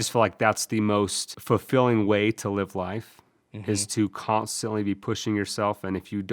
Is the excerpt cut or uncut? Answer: cut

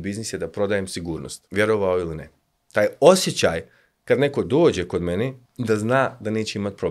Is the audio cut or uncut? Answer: cut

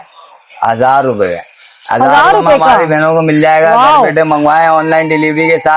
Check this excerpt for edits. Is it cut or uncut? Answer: uncut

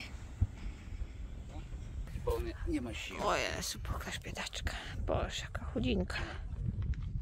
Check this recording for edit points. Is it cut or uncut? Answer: cut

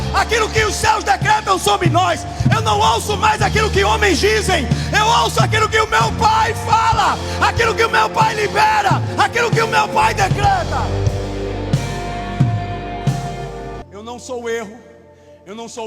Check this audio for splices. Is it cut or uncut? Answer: cut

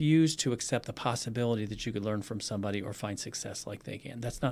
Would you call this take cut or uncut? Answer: uncut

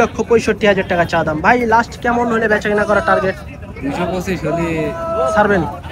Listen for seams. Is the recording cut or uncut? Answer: uncut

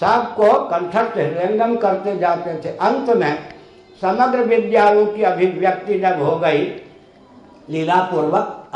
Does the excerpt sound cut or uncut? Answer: uncut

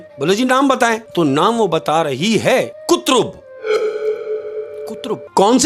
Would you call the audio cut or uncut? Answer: cut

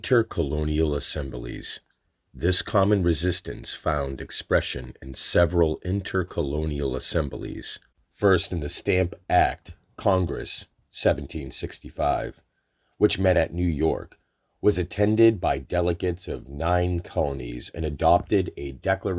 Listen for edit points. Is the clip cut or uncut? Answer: cut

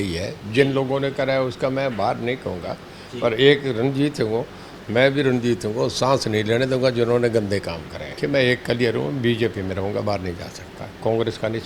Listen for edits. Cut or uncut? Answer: cut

